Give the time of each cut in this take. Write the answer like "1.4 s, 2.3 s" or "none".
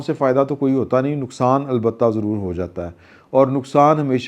none